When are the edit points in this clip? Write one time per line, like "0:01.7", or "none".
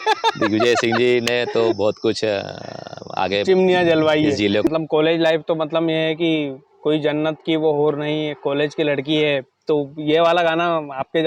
0:04.7